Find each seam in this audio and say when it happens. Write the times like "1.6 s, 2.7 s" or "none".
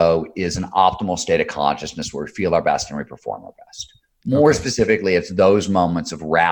none